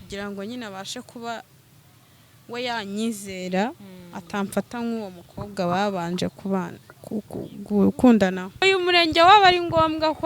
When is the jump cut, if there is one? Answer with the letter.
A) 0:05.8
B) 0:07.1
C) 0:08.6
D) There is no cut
C